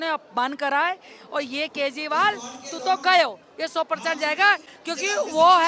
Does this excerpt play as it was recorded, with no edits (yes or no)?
no